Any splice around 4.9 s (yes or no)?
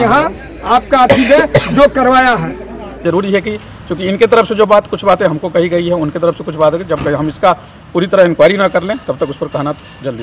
no